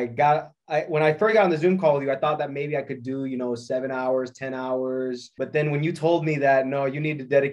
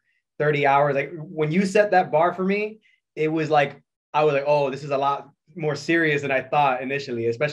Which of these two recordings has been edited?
first; 1 cut; at 5.3 s

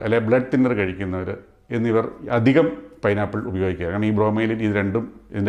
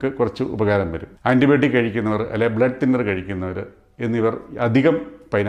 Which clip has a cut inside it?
second; 1 cut; at 1.0 s

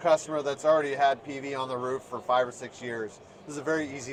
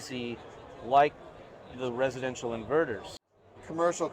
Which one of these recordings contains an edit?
second; 1 cut; at 3.2 s

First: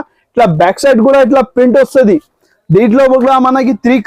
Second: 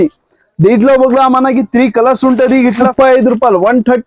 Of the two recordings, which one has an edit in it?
second; 1 cut; at 2.9 s

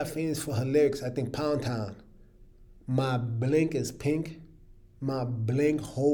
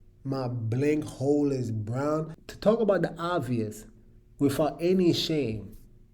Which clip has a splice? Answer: second; 1 cut; at 2.3 s

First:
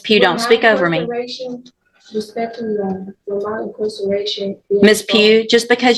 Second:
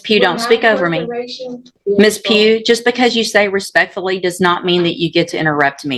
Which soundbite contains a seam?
second; 1 cut; at 1.7 s

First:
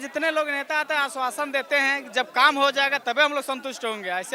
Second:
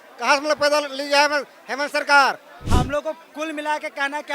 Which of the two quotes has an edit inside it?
second; 1 cut; at 2.5 s

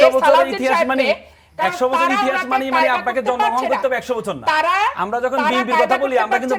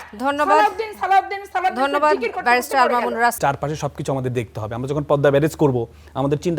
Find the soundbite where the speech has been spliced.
second; 1 cut; at 3.4 s

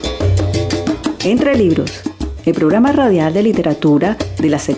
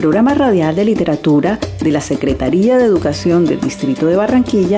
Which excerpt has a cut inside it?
first; 1 cut; at 1.2 s

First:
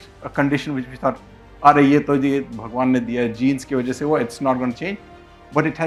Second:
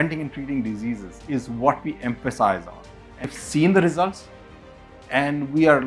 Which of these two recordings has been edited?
second; 1 cut; at 3.3 s

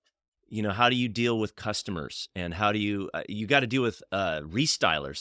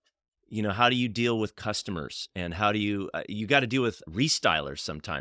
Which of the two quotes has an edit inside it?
second; 1 cut; at 4.0 s

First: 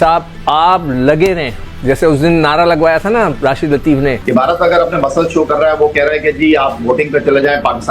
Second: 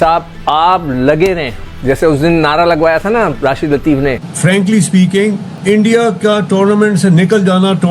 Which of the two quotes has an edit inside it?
second; 1 cut; at 4.2 s

